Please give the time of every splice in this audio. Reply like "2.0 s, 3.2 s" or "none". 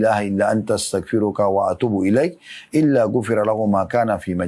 none